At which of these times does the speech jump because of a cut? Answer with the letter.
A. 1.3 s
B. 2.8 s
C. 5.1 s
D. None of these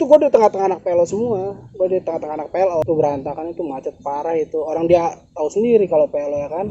B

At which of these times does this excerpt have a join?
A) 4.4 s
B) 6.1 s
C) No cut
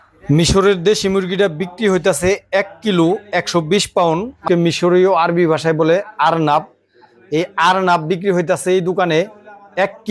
A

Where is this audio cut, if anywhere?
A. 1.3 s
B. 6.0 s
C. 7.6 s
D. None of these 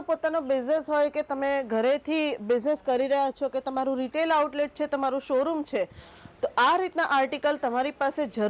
D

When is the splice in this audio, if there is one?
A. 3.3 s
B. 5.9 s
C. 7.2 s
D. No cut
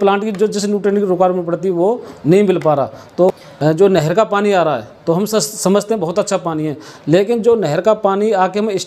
A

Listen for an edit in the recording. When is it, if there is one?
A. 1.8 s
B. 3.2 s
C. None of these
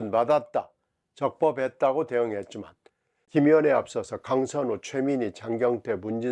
B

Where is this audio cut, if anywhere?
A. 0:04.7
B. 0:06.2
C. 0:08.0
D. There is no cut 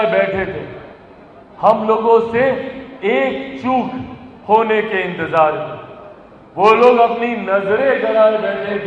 D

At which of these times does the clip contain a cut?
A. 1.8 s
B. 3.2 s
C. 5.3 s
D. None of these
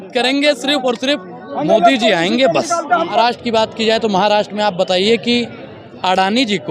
B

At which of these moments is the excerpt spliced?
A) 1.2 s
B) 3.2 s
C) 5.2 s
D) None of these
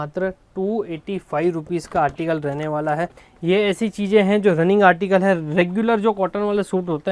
B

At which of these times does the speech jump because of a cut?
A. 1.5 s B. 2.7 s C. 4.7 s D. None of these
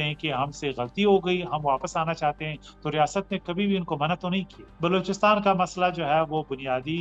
C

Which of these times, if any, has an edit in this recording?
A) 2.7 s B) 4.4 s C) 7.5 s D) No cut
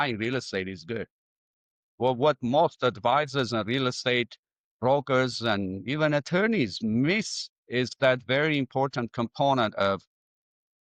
D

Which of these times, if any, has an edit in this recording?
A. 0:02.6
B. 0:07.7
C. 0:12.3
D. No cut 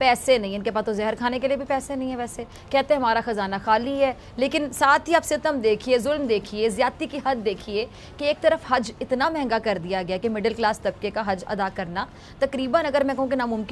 D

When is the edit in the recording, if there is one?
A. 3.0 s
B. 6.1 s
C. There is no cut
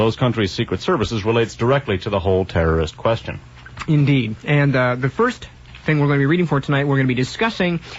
B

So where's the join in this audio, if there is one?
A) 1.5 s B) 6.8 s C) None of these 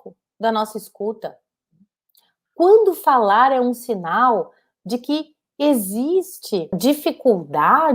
B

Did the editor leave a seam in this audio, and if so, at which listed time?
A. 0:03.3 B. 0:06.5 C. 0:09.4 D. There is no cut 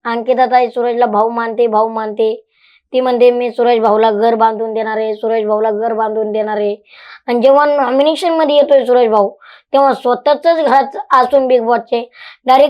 D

